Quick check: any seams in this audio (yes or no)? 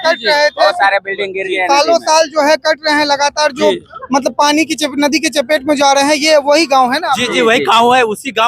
no